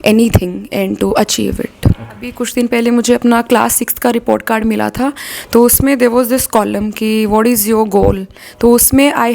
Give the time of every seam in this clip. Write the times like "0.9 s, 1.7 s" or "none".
2.4 s